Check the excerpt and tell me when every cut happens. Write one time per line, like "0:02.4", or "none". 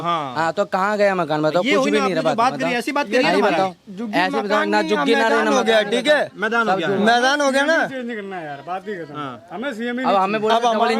none